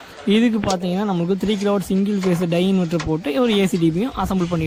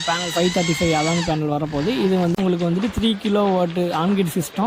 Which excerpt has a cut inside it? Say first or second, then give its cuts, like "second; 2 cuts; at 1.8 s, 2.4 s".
second; 1 cut; at 2.4 s